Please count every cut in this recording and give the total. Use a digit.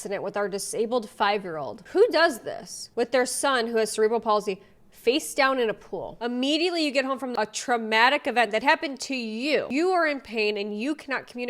4